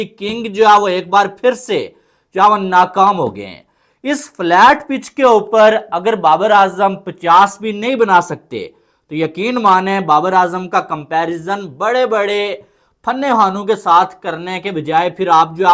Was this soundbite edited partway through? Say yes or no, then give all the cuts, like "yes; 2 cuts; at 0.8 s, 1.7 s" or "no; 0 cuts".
no; 0 cuts